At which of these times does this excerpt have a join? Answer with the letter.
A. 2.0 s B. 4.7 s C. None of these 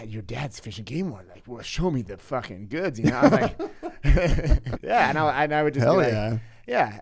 B